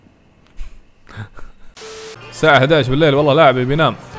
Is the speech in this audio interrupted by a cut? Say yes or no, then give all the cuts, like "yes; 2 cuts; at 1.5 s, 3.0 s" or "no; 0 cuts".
yes; 1 cut; at 2.1 s